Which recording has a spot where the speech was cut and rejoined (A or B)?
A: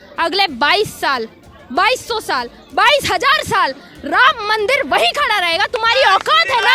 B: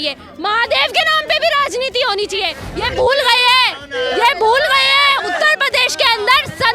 B